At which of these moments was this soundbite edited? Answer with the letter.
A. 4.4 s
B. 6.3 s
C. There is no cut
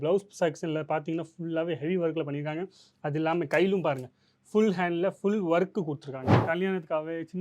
B